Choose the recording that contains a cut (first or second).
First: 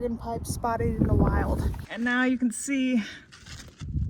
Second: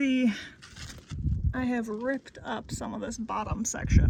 first